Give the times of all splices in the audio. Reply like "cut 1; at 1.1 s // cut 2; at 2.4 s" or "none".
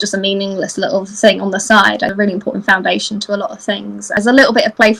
cut 1; at 2.1 s // cut 2; at 4.2 s